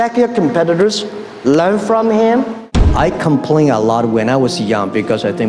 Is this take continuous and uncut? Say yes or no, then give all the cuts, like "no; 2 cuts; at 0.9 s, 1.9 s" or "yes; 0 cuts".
no; 1 cut; at 2.8 s